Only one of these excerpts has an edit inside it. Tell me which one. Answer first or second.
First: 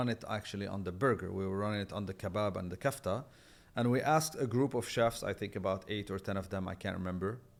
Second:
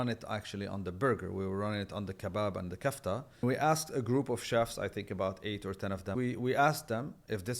second